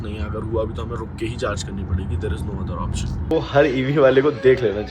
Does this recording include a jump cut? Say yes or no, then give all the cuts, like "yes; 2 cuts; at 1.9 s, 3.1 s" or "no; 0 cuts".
yes; 1 cut; at 3.3 s